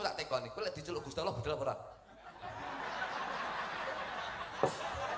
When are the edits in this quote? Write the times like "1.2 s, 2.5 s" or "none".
none